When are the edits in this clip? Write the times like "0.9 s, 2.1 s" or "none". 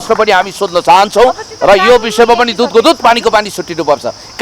none